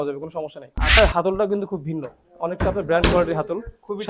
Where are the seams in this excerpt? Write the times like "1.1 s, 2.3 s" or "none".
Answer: 1.0 s